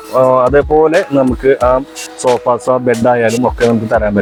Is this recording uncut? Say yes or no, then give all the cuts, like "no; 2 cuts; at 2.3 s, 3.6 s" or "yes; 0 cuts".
yes; 0 cuts